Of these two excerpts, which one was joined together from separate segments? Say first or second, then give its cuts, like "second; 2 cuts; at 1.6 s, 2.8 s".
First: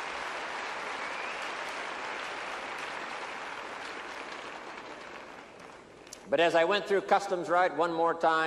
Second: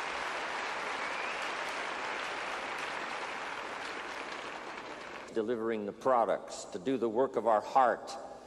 first; 1 cut; at 5.3 s